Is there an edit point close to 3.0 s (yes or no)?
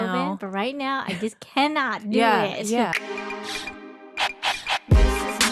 yes